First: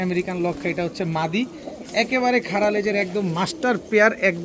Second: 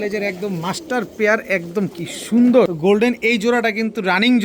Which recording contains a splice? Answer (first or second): second